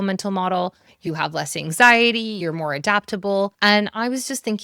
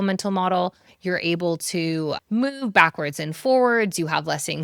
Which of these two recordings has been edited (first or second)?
first